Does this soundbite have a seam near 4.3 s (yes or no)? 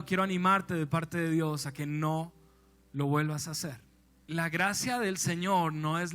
yes